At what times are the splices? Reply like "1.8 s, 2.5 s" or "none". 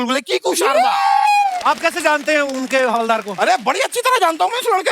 1.6 s